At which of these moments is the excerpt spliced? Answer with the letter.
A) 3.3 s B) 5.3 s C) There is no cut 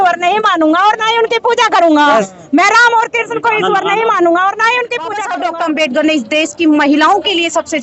B